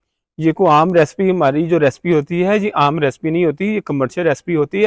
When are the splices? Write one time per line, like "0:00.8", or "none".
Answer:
none